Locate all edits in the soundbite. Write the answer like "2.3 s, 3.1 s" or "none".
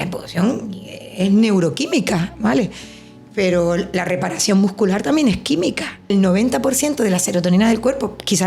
6.1 s

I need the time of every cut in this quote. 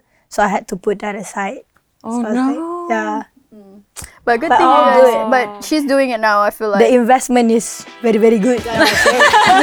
none

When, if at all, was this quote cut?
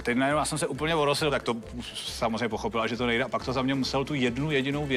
1.3 s

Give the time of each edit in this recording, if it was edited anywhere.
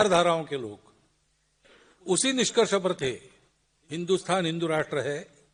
none

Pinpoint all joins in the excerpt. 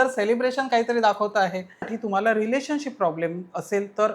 2.0 s

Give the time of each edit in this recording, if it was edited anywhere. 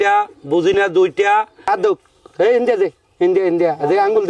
1.7 s

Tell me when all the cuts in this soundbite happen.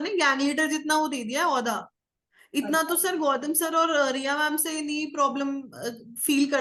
none

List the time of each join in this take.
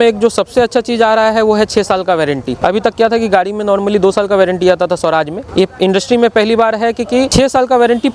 2.5 s, 5.4 s, 7.3 s

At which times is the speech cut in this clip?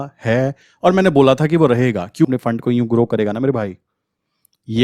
2.2 s

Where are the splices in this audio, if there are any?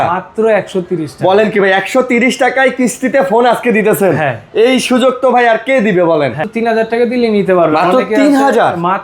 6.5 s

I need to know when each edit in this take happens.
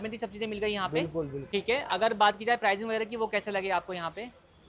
1.4 s

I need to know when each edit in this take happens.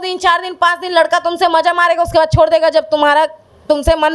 none

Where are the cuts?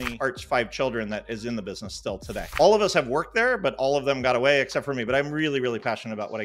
none

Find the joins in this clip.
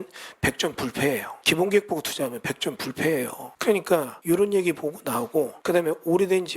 1.3 s, 3.5 s, 4.1 s, 5.6 s

